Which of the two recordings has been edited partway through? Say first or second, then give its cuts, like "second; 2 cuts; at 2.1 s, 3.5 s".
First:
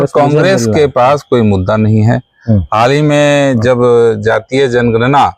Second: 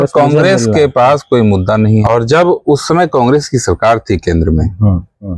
second; 1 cut; at 2.0 s